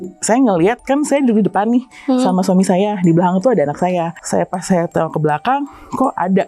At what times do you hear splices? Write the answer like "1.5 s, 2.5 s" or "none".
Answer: 4.1 s